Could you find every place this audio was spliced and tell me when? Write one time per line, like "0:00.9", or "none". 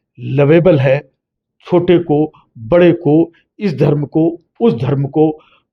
none